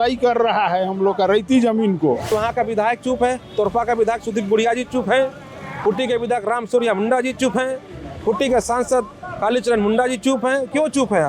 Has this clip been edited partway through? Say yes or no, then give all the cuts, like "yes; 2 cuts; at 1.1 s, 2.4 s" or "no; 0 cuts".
yes; 1 cut; at 2.3 s